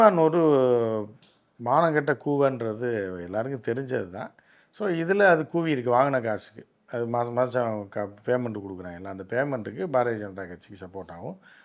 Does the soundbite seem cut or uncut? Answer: uncut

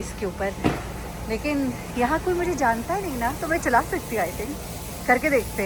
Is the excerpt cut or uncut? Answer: uncut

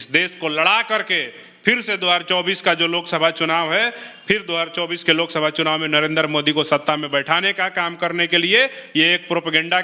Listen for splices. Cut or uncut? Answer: uncut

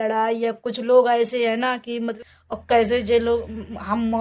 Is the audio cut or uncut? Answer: cut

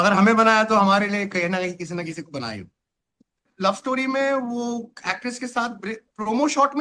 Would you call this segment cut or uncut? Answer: cut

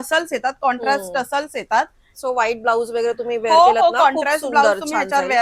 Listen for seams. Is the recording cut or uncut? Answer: uncut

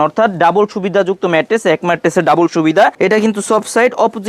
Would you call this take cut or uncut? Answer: cut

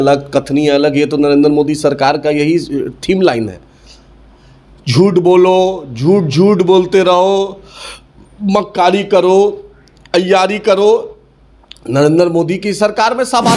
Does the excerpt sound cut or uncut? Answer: uncut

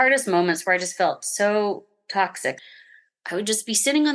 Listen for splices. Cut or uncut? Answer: cut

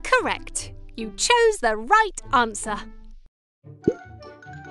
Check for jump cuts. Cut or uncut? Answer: uncut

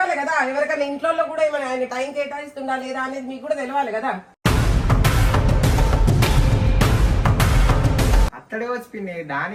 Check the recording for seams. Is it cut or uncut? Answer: uncut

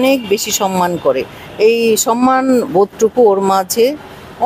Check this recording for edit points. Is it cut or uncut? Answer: uncut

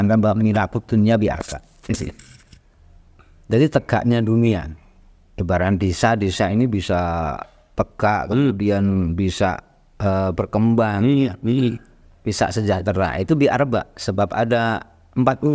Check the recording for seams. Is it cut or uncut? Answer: uncut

